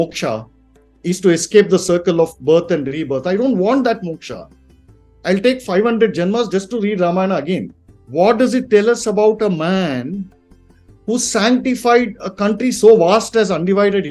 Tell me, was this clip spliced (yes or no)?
yes